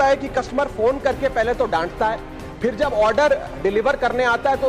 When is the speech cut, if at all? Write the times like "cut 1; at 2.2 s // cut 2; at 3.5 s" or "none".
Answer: none